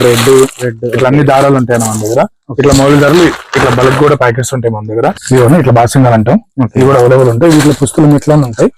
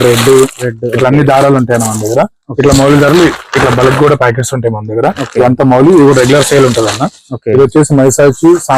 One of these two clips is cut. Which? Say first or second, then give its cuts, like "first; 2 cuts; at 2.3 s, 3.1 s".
first; 1 cut; at 5.2 s